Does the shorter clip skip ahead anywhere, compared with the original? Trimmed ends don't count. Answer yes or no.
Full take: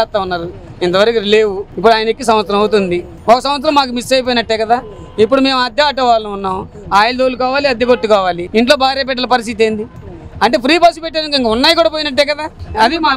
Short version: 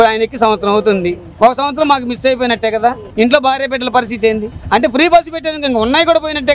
yes